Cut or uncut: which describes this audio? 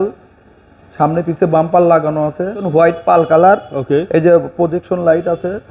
cut